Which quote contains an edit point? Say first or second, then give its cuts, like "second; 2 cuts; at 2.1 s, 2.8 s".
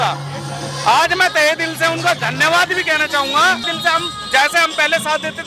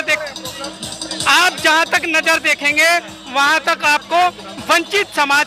first; 1 cut; at 3.6 s